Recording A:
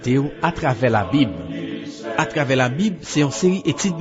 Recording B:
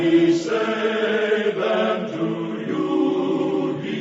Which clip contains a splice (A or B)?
A